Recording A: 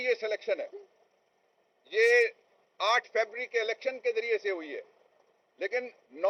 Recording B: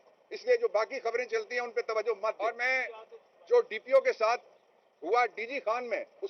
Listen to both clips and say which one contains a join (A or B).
B